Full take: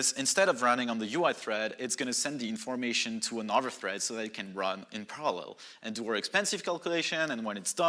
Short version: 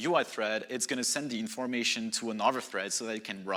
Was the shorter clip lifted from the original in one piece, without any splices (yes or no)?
yes